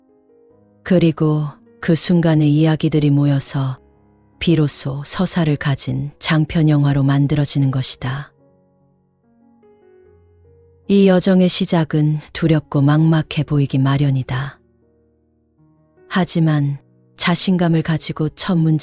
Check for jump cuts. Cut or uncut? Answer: uncut